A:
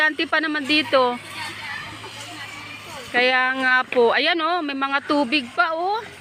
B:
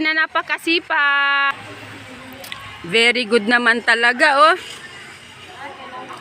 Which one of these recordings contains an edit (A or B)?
B